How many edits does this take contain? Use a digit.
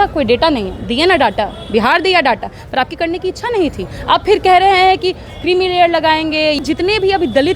1